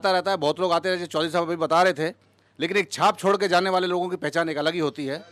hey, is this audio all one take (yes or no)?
yes